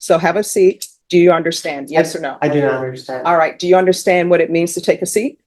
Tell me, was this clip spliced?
yes; 1 cut; at 0.9 s

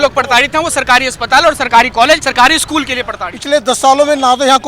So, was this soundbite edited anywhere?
yes; 2 cuts; at 2.3 s, 3.3 s

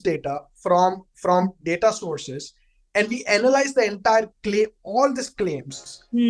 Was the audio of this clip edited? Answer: no; 0 cuts

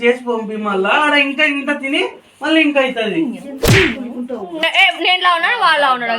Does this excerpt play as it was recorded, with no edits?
no; 1 cut; at 4.6 s

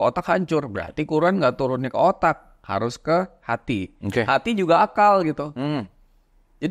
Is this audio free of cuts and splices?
yes; 0 cuts

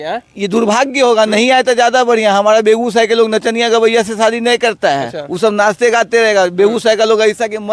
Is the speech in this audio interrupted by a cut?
no; 0 cuts

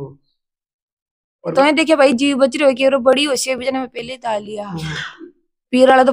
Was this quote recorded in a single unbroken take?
no; 1 cut; at 1.5 s

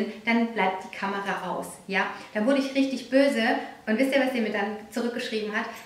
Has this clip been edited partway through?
no; 0 cuts

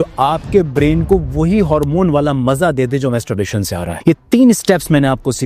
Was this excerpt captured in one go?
no; 1 cut; at 3.9 s

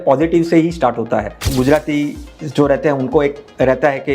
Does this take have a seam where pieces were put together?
yes; 1 cut; at 1.5 s

